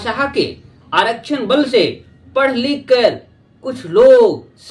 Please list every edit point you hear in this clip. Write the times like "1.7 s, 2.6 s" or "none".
none